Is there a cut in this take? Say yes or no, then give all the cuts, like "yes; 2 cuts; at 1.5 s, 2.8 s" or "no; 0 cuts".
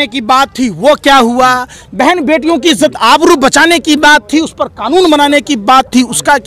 no; 0 cuts